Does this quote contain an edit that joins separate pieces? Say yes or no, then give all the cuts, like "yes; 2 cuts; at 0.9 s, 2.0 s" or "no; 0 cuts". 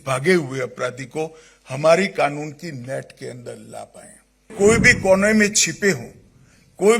yes; 1 cut; at 4.5 s